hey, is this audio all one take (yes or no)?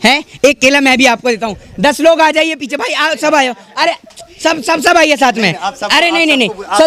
yes